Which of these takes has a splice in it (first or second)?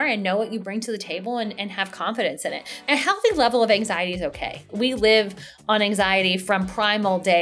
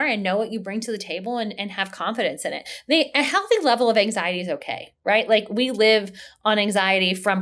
first